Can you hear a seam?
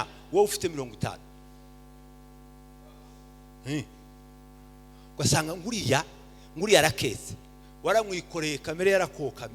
no; 0 cuts

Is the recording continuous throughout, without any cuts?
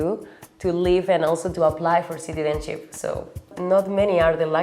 no; 1 cut; at 3.5 s

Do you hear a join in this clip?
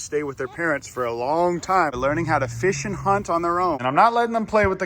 yes; 2 cuts; at 2.0 s, 3.8 s

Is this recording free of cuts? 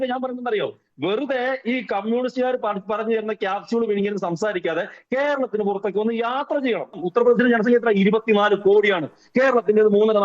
no; 1 cut; at 6.9 s

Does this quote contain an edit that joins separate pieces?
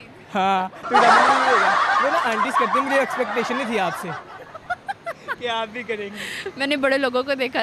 no; 0 cuts

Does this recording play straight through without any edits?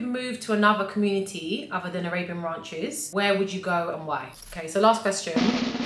no; 2 cuts; at 3.0 s, 4.5 s

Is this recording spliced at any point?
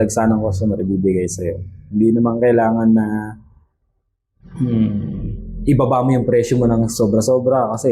no; 0 cuts

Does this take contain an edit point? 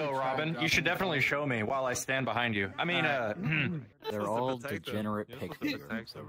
yes; 1 cut; at 3.9 s

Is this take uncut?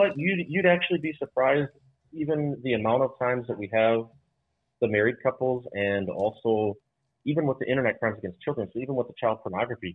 yes; 0 cuts

